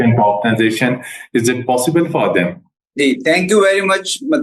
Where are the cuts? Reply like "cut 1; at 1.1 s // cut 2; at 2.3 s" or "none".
none